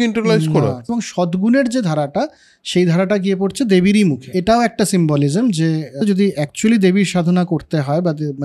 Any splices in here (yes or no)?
yes